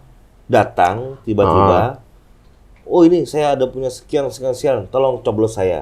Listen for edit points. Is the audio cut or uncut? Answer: uncut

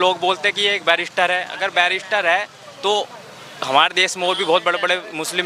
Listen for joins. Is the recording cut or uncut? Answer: uncut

